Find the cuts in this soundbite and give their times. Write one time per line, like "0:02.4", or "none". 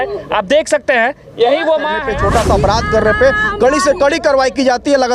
0:02.0

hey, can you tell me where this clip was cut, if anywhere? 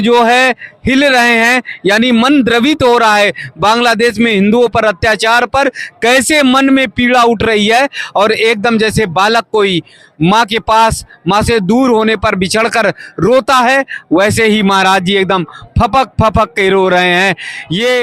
none

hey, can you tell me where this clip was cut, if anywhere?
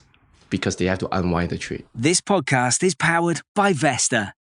0:01.8

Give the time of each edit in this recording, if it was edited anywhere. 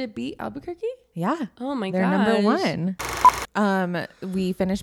0:03.0

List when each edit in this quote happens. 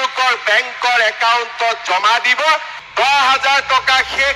0:02.8

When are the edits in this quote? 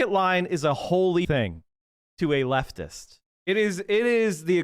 0:01.2

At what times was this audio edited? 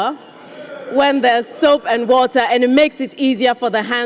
none

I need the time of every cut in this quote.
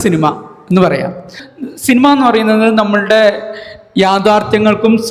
0:01.3

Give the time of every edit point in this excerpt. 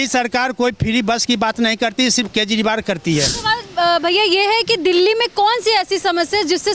0:03.3

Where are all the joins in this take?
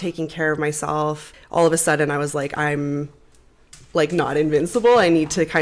0:01.3

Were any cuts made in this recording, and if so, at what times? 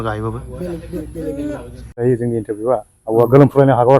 0:02.0

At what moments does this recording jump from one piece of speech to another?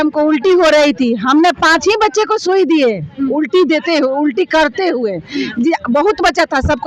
none

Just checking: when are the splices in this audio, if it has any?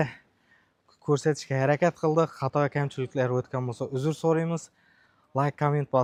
none

